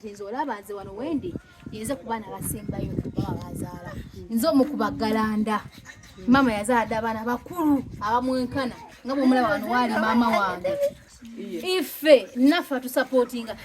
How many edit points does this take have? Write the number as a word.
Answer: one